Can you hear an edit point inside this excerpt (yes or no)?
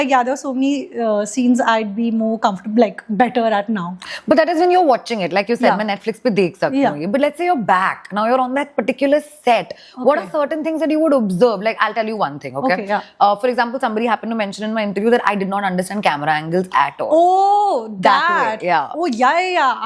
no